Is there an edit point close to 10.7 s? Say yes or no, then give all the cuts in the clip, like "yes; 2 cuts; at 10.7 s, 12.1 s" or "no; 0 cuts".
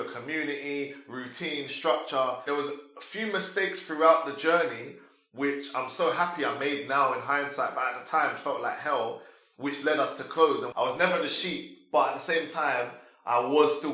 yes; 2 cuts; at 2.4 s, 10.7 s